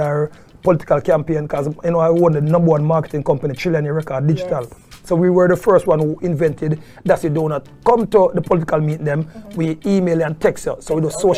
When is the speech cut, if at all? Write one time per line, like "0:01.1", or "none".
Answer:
none

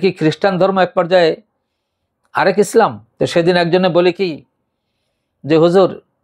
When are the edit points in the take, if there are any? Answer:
0:03.0

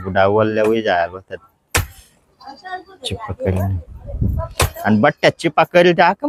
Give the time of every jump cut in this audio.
none

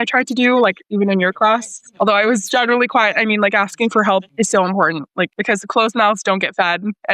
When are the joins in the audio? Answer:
0:04.3
0:05.4

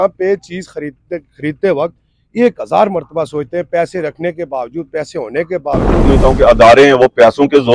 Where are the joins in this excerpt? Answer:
0:06.0

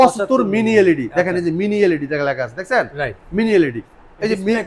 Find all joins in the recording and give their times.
none

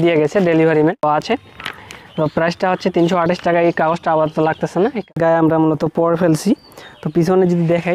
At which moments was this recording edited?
0:01.0
0:05.0

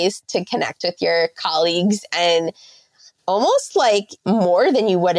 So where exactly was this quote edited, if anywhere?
0:04.1

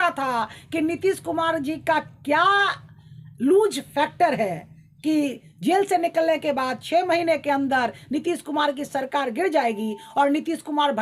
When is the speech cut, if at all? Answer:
none

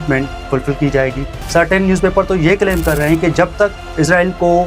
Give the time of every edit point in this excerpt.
0:01.3

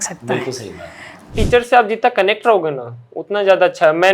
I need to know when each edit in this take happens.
0:01.3

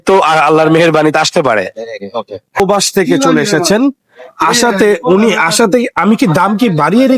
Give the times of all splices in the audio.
0:02.6

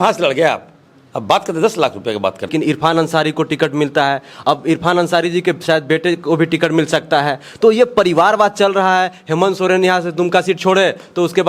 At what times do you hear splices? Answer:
0:02.5

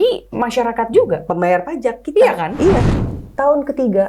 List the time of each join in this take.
0:03.0

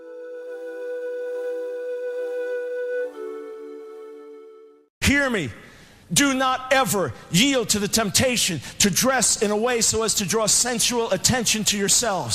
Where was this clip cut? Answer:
0:04.9

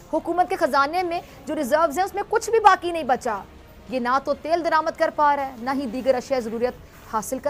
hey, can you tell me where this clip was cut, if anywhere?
none

